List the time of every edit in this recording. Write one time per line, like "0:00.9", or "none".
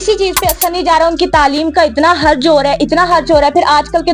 none